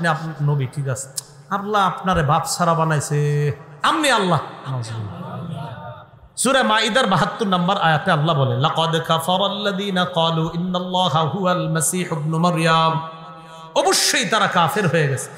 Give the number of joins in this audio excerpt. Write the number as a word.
zero